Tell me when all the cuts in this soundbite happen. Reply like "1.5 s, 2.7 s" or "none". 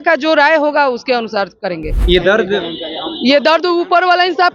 2.0 s